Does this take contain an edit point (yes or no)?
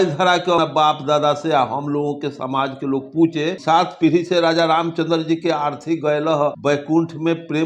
yes